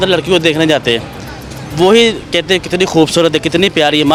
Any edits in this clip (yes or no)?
no